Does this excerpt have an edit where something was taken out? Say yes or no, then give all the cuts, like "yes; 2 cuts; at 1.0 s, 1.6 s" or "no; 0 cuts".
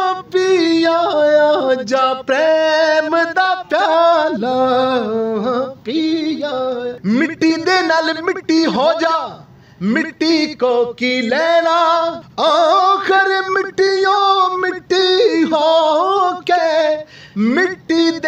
yes; 2 cuts; at 7.0 s, 12.2 s